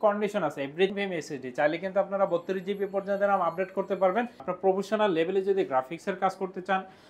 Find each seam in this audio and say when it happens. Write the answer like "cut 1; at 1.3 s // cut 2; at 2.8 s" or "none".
cut 1; at 0.9 s // cut 2; at 4.5 s